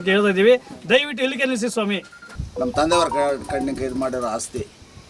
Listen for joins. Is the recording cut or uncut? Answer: cut